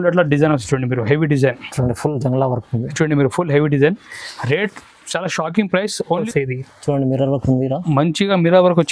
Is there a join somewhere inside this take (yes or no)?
yes